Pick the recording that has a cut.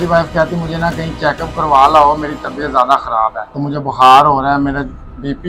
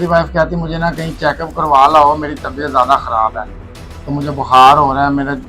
first; 1 cut; at 3.5 s

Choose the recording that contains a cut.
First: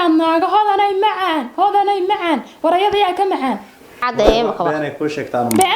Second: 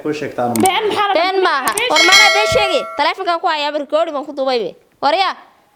first; 1 cut; at 4.0 s

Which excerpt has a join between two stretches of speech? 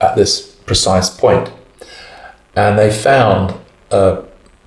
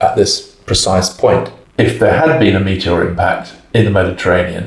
second; 1 cut; at 1.6 s

